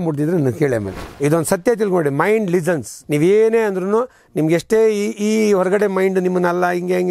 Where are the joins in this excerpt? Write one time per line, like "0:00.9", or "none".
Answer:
0:01.0
0:02.9

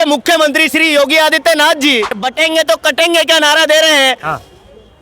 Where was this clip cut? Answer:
0:02.1

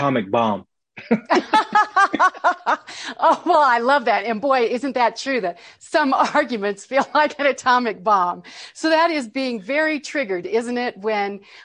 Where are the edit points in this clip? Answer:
none

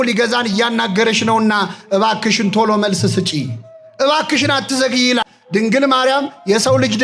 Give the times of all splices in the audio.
0:05.2

